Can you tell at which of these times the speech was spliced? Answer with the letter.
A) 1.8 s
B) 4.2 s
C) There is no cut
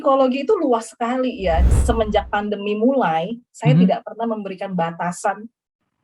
A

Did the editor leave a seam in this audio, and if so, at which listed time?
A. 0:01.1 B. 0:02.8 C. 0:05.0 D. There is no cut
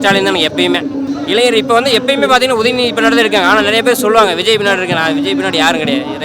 A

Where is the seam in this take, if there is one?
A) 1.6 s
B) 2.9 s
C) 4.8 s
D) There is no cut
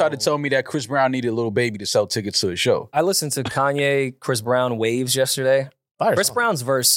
B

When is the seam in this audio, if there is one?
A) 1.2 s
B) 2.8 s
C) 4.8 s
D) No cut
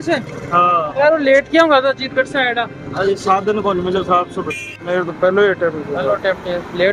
D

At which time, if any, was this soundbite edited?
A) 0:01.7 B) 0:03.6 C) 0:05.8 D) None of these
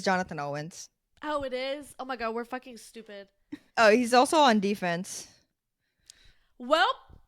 B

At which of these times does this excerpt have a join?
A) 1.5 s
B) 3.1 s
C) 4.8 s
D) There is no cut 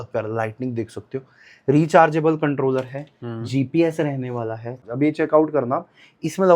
C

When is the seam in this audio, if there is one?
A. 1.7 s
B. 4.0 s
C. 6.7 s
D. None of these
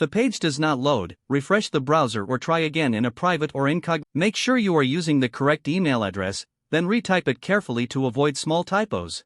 B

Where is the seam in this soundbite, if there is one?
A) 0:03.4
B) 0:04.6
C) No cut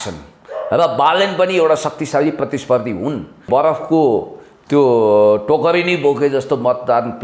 A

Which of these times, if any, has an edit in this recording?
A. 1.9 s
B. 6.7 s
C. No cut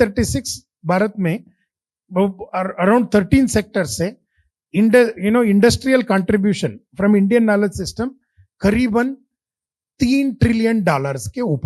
C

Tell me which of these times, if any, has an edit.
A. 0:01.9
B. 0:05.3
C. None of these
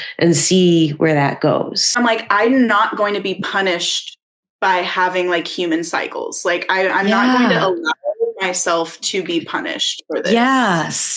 A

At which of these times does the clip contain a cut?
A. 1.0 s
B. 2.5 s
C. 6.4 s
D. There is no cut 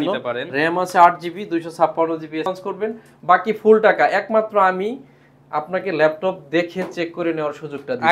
B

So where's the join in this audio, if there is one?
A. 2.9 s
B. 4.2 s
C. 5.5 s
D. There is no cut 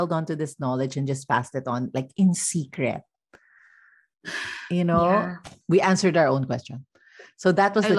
C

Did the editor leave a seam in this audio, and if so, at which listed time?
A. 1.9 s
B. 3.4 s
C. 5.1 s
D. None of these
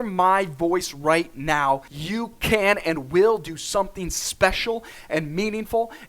A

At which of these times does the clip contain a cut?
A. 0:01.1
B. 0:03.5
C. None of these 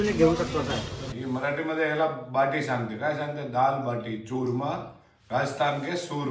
A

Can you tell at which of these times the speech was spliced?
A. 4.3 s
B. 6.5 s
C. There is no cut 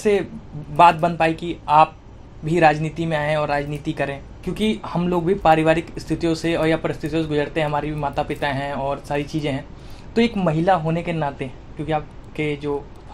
A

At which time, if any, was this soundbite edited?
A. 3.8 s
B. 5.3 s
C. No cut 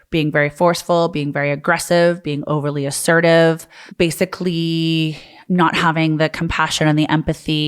A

